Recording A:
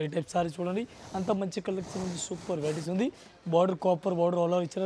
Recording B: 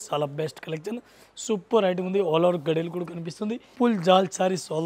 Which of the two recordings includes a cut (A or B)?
B